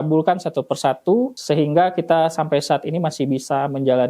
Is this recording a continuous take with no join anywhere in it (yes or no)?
no